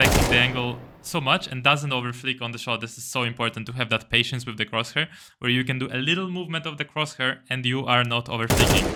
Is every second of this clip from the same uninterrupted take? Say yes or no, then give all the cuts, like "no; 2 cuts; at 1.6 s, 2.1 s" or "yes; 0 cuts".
yes; 0 cuts